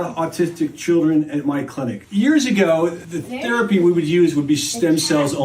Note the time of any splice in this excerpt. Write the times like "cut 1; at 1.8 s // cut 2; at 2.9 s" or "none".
cut 1; at 1.9 s